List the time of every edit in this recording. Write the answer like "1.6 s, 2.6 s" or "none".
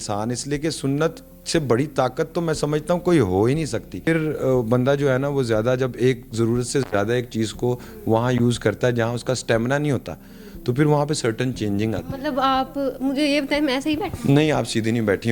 4.1 s